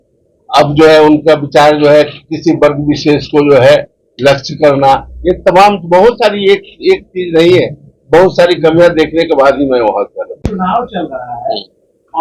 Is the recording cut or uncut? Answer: uncut